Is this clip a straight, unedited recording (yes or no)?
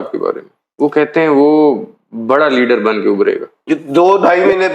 no